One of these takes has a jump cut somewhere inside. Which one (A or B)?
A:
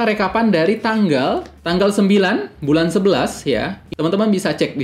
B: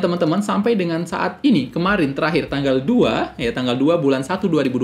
A